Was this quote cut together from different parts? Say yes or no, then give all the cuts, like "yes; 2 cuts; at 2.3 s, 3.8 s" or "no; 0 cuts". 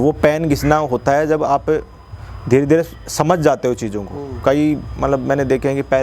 no; 0 cuts